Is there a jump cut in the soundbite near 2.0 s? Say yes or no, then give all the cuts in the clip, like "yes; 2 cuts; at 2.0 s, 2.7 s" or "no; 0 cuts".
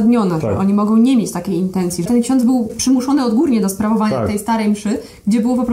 yes; 2 cuts; at 2.0 s, 2.8 s